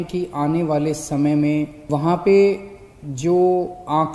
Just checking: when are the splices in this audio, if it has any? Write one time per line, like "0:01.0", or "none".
0:01.8